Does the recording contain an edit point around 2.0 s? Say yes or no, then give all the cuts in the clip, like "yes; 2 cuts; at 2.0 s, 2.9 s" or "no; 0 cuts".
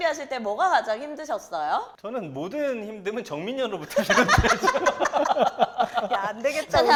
no; 0 cuts